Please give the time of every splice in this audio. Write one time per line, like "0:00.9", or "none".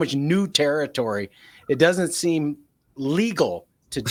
none